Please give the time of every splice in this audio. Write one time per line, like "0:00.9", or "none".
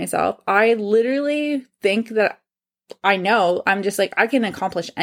none